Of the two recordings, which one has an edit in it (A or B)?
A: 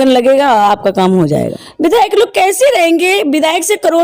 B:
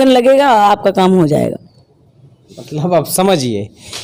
A